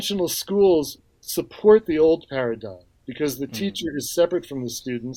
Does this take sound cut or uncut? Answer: cut